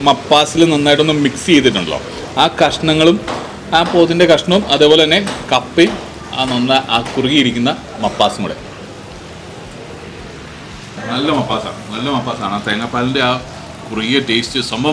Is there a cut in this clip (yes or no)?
yes